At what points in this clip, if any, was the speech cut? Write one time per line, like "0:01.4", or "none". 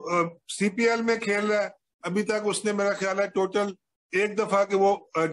none